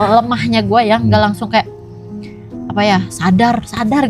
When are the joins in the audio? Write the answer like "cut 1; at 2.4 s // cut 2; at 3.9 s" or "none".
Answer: none